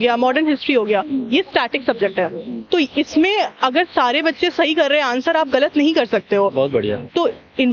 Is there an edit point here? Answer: no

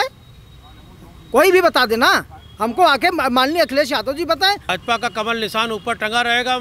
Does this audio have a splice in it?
yes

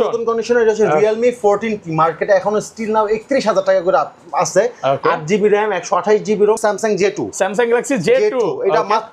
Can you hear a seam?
yes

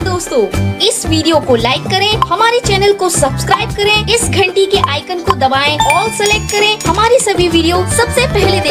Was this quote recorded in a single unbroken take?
yes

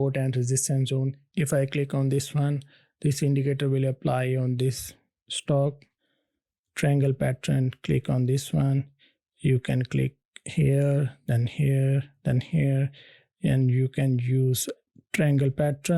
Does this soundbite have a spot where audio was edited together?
yes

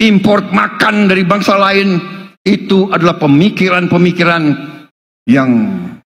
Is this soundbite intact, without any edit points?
yes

